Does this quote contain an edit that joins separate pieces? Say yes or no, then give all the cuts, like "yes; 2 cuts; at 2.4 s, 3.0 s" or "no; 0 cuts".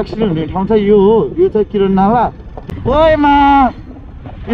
yes; 1 cut; at 2.5 s